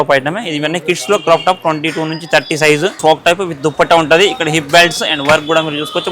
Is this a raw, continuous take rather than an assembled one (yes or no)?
no